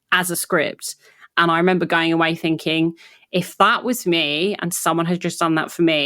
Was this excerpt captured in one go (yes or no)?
no